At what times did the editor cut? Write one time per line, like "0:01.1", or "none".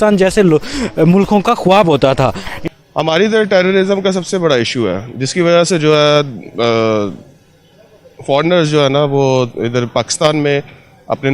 0:02.5